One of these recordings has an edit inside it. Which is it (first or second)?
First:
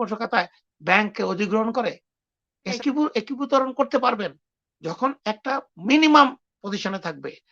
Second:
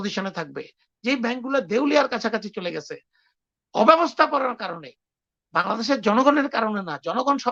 first